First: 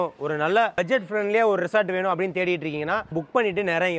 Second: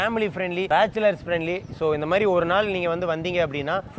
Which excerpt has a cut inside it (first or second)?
first